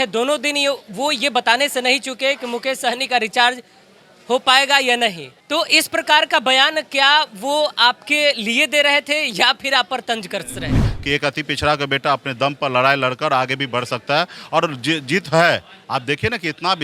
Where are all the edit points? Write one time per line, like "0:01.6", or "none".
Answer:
0:05.3
0:10.8